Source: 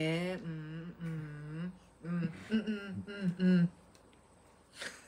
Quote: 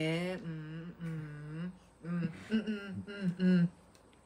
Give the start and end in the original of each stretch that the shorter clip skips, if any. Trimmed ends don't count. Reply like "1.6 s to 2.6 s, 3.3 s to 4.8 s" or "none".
none